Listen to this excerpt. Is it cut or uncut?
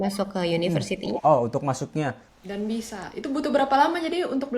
cut